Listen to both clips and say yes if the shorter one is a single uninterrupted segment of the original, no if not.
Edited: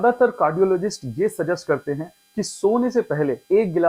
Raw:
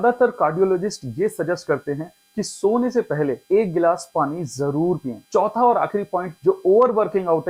yes